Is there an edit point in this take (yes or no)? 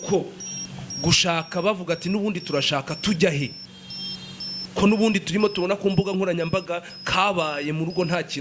no